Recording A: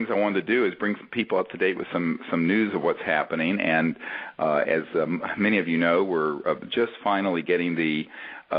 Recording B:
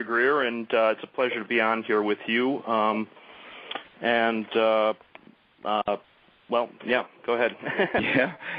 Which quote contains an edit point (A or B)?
B